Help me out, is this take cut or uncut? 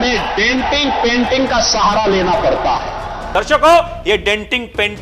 cut